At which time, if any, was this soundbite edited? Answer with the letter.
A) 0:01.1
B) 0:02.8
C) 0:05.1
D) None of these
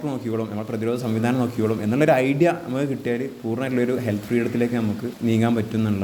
C